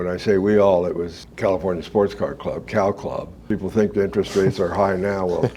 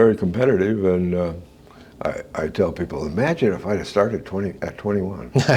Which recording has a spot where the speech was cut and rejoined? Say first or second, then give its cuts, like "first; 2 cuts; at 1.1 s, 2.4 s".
first; 1 cut; at 3.3 s